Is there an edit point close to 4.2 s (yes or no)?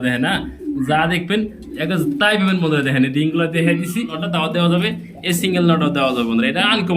yes